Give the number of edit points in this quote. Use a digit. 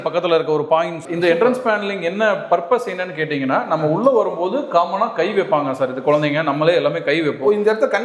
1